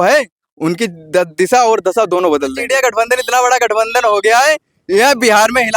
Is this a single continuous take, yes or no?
no